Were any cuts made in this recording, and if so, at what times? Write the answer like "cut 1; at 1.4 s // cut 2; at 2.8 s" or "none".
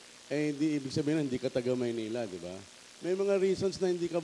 none